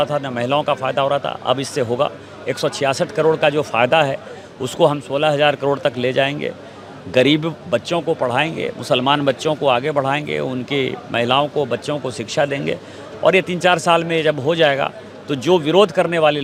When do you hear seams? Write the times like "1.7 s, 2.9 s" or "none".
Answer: none